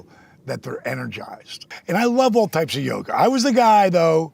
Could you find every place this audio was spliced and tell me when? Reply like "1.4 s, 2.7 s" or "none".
1.6 s

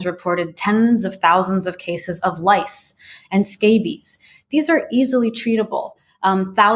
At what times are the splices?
none

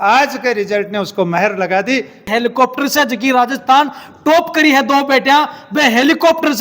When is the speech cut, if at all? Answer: 2.3 s

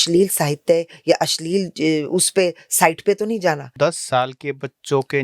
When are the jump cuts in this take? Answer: 3.7 s

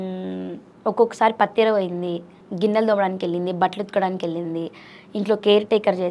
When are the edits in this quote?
2.4 s

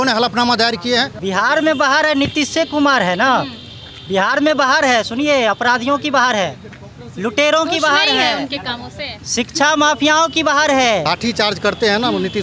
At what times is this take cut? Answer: 1.1 s, 11.0 s

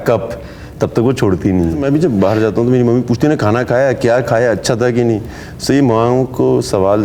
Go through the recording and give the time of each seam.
1.8 s

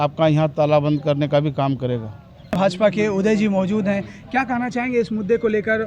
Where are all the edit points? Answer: none

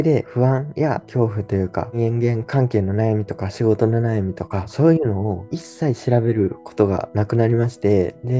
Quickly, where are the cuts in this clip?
none

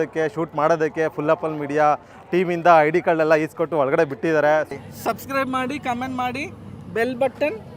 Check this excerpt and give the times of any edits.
4.7 s

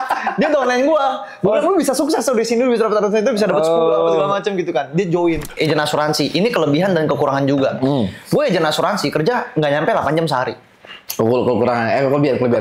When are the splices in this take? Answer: 5.5 s

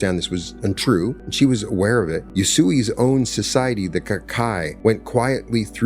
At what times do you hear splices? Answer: 1.2 s, 2.2 s, 4.7 s

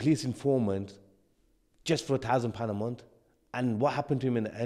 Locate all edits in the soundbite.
none

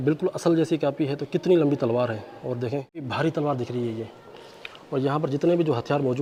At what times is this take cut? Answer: none

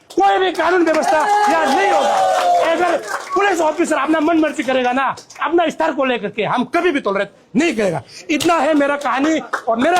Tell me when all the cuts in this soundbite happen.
none

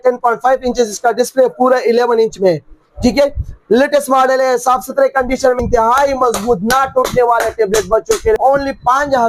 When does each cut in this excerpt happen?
5.6 s, 8.4 s

